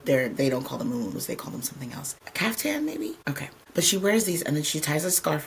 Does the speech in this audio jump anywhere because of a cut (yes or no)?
yes